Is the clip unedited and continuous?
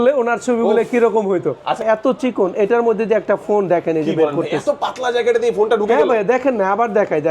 no; 1 cut; at 1.8 s

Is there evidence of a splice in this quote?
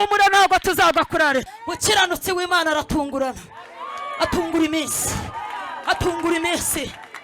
yes; 1 cut; at 1.6 s

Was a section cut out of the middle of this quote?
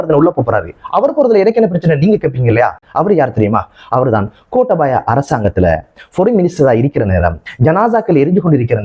no; 0 cuts

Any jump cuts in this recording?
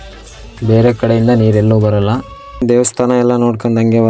yes; 1 cut; at 2.6 s

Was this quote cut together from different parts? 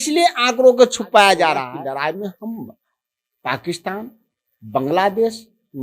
yes; 1 cut; at 1.7 s

